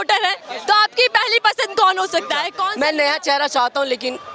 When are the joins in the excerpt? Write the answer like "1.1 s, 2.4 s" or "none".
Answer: 2.5 s

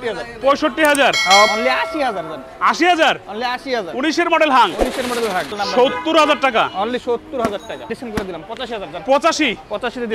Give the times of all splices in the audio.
1.5 s, 5.6 s, 7.8 s

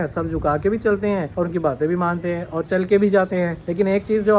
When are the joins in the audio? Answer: 1.3 s, 3.6 s

